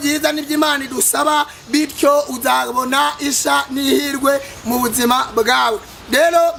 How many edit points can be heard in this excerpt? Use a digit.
0